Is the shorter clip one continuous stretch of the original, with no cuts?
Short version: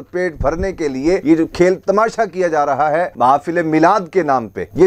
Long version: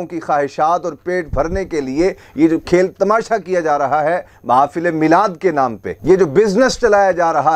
no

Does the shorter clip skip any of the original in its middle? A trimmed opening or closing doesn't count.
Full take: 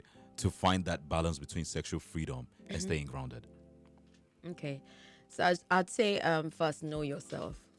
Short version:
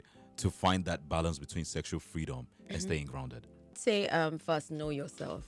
yes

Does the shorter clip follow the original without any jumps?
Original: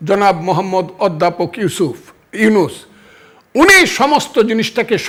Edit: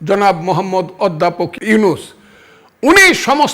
no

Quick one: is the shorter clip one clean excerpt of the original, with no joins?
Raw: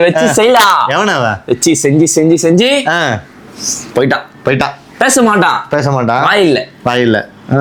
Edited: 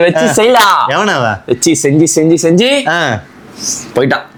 yes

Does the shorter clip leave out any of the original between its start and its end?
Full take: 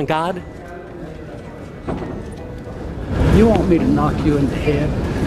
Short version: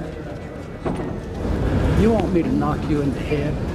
yes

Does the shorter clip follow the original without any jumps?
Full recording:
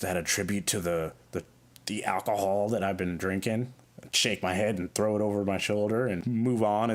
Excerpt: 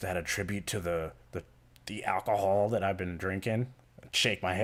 yes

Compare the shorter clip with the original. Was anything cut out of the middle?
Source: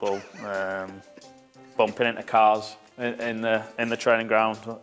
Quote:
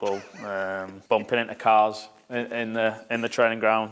yes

